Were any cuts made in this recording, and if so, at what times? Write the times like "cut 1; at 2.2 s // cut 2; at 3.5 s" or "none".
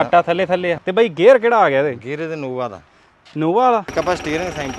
cut 1; at 0.8 s // cut 2; at 3.9 s